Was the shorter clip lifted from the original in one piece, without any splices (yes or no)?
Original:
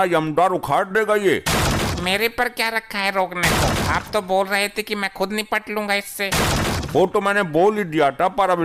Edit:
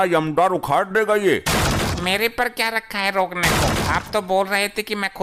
yes